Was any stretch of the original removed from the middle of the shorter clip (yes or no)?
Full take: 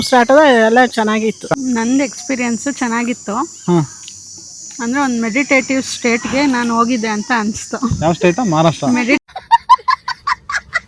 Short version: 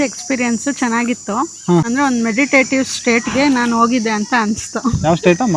yes